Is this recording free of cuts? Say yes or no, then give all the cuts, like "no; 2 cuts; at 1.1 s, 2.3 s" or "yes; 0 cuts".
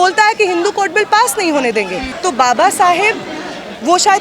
no; 1 cut; at 2.1 s